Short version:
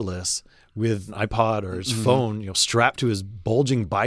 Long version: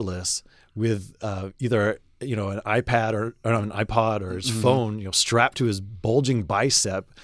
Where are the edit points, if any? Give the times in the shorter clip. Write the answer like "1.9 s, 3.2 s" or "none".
1.1 s